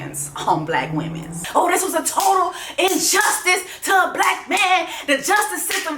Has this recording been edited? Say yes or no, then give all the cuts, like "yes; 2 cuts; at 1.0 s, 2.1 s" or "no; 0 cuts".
yes; 1 cut; at 1.4 s